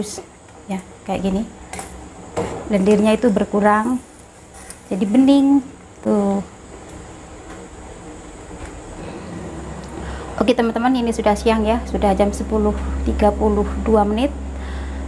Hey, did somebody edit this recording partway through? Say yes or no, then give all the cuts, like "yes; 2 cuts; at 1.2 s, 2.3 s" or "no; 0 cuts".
no; 0 cuts